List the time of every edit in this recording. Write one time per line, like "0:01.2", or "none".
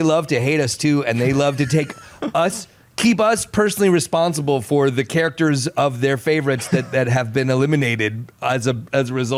none

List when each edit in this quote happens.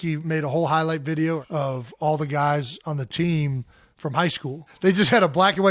0:01.4
0:04.6

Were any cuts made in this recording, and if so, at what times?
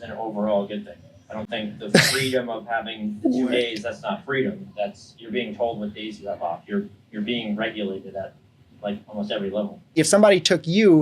0:09.9

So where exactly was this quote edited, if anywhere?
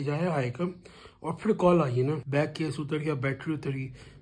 0:02.2

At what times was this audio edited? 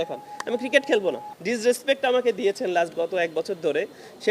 0:01.3

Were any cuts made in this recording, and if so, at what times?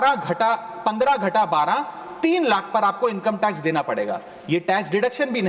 none

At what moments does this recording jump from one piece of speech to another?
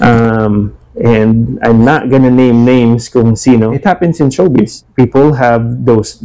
0:03.8
0:04.8

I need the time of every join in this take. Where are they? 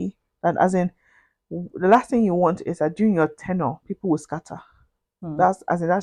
none

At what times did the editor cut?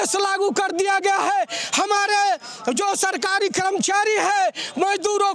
none

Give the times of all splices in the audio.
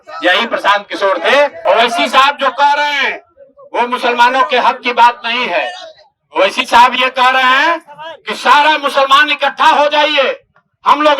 0:01.6

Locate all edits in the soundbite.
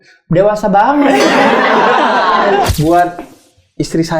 0:02.7

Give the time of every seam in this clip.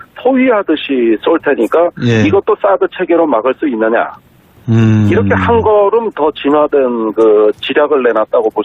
0:07.6

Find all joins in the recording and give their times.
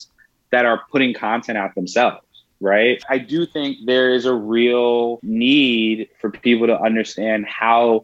0:03.0
0:05.2

